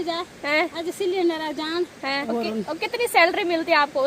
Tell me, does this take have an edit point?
yes; 1 cut; at 2.3 s

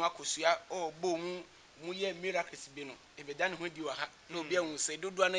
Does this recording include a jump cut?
no; 0 cuts

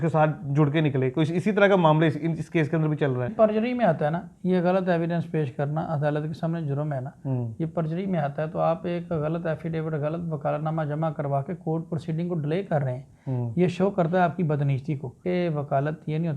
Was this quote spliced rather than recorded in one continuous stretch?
yes; 2 cuts; at 3.3 s, 15.2 s

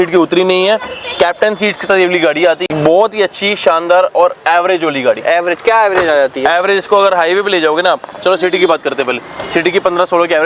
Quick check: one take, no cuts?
yes; 0 cuts

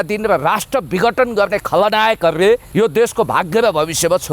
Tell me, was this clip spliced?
yes; 1 cut; at 2.7 s

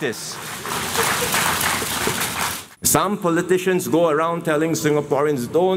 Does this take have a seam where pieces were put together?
yes; 1 cut; at 2.6 s

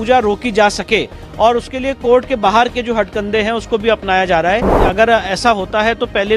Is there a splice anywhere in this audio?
yes; 1 cut; at 4.8 s

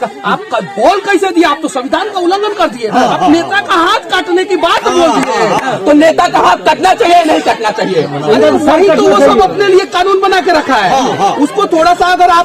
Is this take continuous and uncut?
no; 1 cut; at 5.8 s

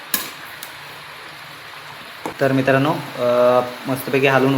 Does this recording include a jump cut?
yes; 1 cut; at 2.3 s

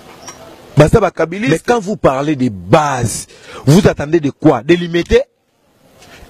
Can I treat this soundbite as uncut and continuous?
no; 1 cut; at 1.4 s

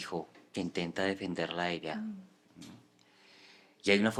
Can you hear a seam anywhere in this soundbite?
no; 0 cuts

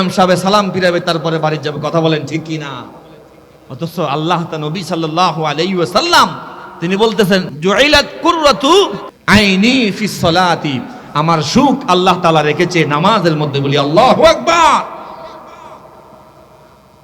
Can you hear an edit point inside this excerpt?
yes; 1 cut; at 9.1 s

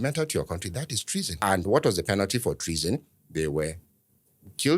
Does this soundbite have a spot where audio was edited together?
yes; 1 cut; at 1.3 s

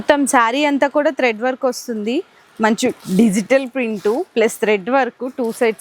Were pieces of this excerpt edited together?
no; 0 cuts

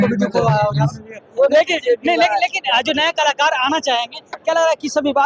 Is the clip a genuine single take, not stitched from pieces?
yes; 0 cuts

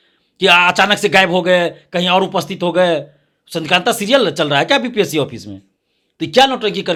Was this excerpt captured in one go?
yes; 0 cuts

